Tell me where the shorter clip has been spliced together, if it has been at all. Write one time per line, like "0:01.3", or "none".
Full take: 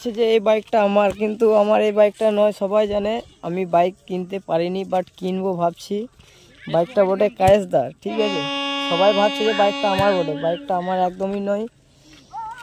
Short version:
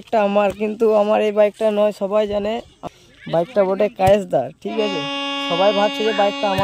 0:02.8